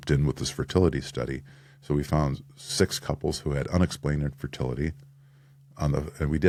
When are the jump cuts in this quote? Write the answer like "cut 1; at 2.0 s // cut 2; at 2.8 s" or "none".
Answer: none